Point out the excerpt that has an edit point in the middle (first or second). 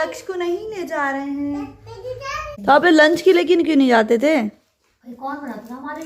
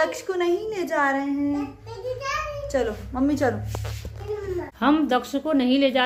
first